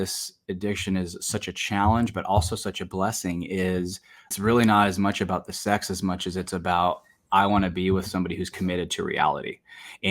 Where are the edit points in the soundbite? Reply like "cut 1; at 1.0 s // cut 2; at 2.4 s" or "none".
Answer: cut 1; at 4.3 s

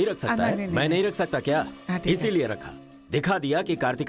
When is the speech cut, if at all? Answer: none

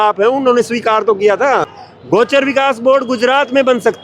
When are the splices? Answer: cut 1; at 1.7 s

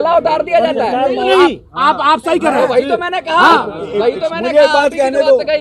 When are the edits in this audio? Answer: cut 1; at 1.3 s

